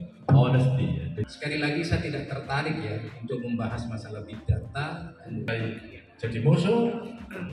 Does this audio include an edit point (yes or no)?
yes